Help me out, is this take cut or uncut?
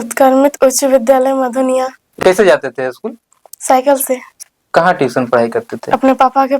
cut